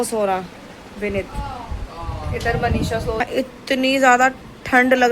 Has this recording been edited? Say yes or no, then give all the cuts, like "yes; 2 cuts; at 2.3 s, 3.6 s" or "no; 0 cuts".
yes; 1 cut; at 3.2 s